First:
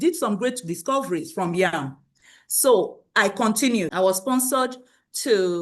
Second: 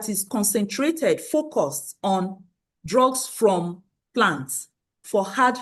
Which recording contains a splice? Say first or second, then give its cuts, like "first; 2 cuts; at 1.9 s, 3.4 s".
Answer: first; 1 cut; at 3.9 s